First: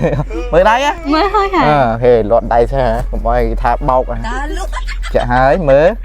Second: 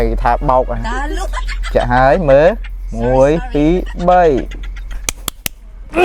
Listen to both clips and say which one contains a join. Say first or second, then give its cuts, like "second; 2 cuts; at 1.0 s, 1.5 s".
first; 1 cut; at 1.0 s